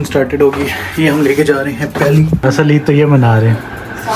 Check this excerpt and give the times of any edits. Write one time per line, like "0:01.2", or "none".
0:02.4